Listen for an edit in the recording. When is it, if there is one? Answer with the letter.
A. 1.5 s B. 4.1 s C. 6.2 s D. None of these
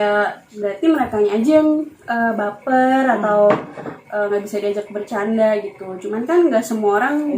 D